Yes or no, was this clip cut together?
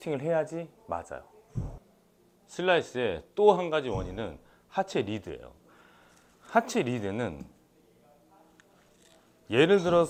no